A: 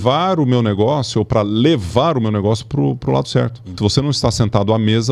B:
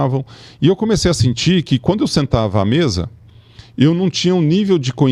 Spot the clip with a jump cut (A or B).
A